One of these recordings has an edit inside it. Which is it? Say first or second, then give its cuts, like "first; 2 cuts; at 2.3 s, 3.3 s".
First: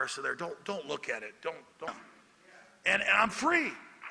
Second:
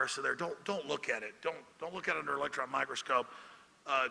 second; 1 cut; at 1.9 s